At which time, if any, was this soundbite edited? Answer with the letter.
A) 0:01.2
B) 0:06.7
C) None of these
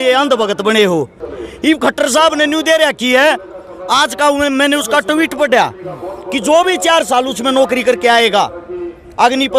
A